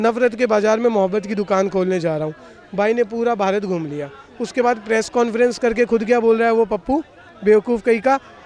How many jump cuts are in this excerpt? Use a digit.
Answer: 0